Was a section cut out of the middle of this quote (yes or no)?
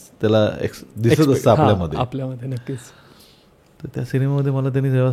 no